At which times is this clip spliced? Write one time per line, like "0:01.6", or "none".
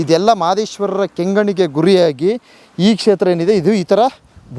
none